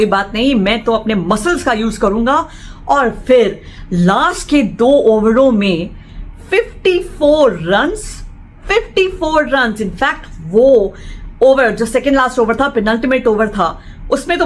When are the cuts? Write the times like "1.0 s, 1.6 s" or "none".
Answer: none